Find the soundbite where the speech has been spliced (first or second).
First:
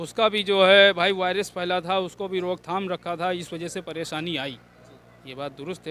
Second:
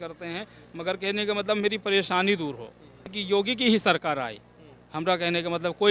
second